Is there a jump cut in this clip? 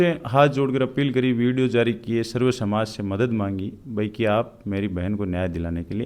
no; 0 cuts

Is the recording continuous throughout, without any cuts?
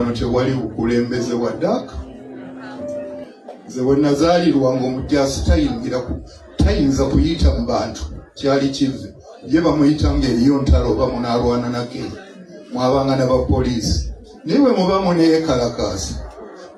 yes; 0 cuts

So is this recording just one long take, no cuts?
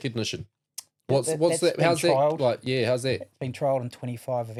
yes; 0 cuts

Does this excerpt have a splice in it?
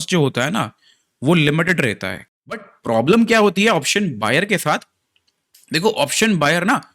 yes; 1 cut; at 2.1 s

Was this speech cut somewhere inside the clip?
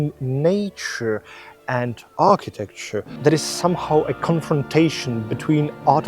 yes; 1 cut; at 3.1 s

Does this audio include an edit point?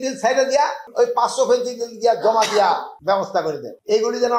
no; 0 cuts

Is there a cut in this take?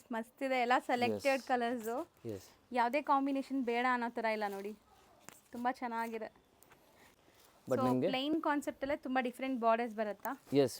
yes; 1 cut; at 7.2 s

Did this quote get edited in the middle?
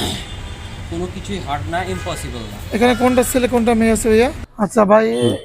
yes; 1 cut; at 4.4 s

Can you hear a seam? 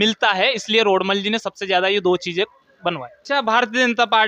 yes; 1 cut; at 3.1 s

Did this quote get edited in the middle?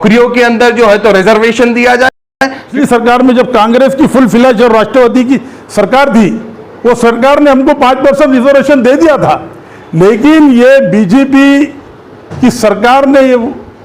yes; 1 cut; at 2.7 s

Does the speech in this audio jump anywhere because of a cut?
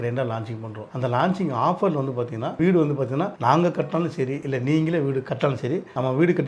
yes; 1 cut; at 2.6 s

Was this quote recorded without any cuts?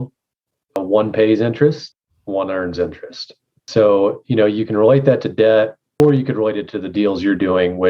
no; 1 cut; at 6.0 s

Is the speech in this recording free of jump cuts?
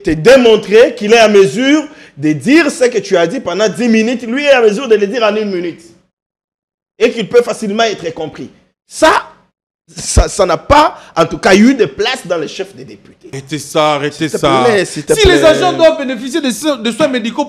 no; 1 cut; at 13.2 s

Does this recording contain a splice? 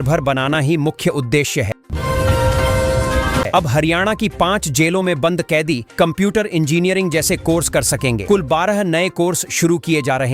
yes; 2 cuts; at 1.8 s, 3.5 s

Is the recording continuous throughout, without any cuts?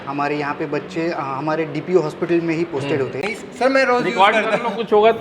no; 1 cut; at 3.3 s

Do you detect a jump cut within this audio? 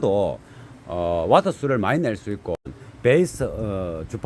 yes; 1 cut; at 2.6 s

